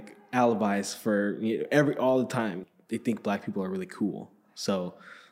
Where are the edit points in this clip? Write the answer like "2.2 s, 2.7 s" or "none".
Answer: 2.6 s